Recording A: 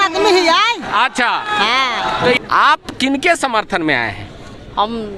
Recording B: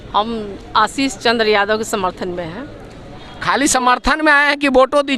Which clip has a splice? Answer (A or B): A